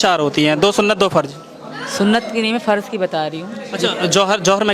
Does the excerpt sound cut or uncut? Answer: uncut